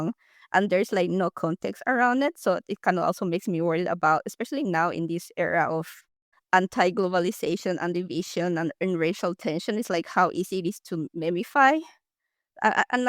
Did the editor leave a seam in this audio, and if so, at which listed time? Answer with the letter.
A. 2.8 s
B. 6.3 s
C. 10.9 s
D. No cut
B